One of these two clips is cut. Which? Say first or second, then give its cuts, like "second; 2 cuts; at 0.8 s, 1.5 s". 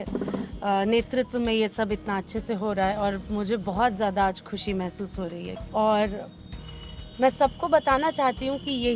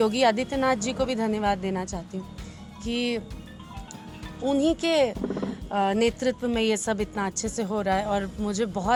first; 1 cut; at 5.5 s